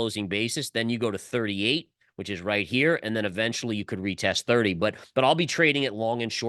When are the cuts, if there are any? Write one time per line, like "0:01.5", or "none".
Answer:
none